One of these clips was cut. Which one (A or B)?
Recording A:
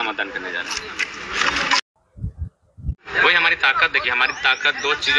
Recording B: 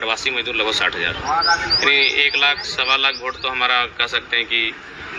A